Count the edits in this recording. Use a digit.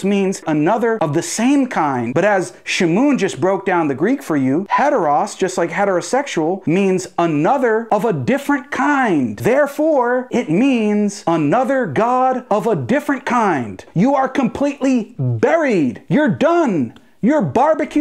3